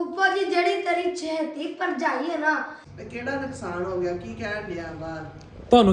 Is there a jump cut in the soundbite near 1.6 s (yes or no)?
no